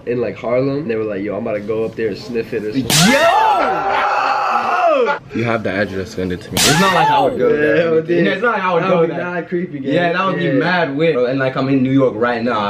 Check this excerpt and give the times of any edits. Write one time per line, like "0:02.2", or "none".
0:00.8
0:05.2
0:11.1